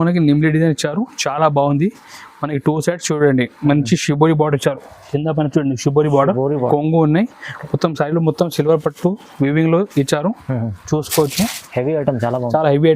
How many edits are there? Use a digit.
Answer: 1